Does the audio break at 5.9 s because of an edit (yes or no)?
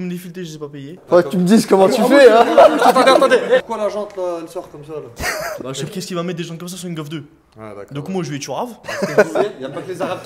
yes